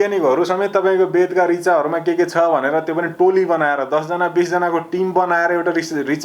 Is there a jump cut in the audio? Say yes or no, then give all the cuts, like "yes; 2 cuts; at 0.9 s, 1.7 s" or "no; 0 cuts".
no; 0 cuts